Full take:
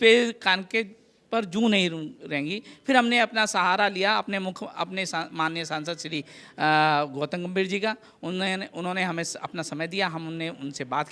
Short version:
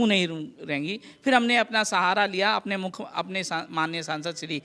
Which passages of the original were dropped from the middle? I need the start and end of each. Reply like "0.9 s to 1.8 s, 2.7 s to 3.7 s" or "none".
none